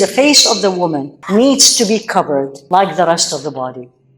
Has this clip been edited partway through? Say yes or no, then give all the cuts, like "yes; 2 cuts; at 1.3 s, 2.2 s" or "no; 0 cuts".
yes; 2 cuts; at 1.1 s, 2.6 s